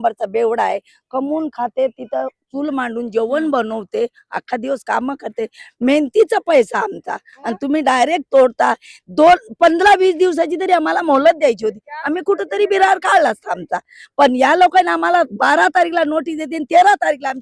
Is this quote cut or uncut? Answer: uncut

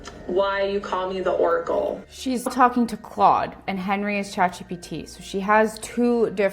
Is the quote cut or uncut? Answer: cut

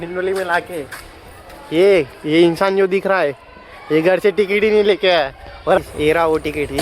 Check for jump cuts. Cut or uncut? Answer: cut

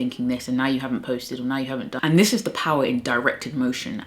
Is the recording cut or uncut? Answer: cut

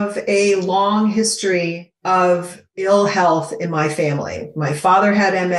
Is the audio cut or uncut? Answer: cut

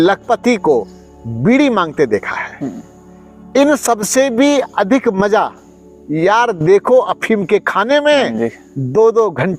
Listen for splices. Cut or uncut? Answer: uncut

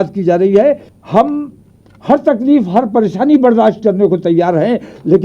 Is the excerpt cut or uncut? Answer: cut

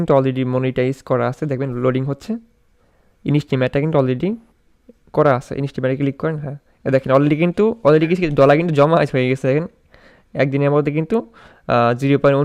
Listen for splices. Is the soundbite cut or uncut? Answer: uncut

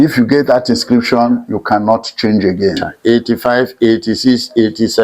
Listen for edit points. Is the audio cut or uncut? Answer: cut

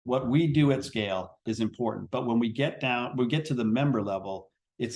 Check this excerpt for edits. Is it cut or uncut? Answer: cut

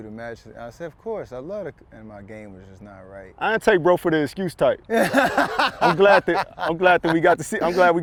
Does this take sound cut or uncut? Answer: uncut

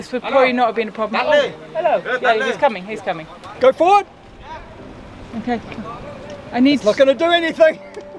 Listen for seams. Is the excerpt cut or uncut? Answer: cut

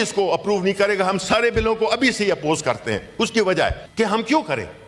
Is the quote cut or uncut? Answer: cut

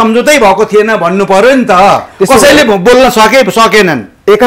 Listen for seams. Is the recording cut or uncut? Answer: uncut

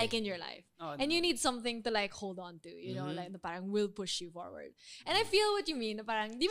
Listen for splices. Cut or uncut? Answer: uncut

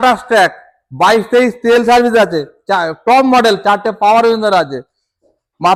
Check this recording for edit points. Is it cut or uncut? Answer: uncut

